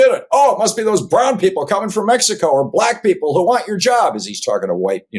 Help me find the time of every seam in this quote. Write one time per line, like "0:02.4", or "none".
none